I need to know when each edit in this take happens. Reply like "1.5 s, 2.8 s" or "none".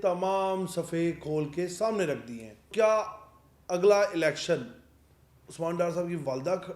2.7 s